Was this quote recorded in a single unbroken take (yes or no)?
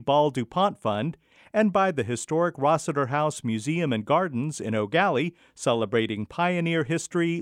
yes